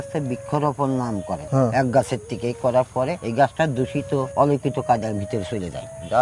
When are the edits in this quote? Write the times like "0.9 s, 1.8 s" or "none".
1.4 s, 3.2 s, 4.3 s